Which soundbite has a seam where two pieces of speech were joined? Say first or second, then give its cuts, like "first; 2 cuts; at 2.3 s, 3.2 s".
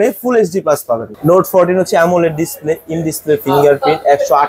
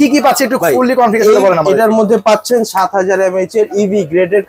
first; 1 cut; at 1.1 s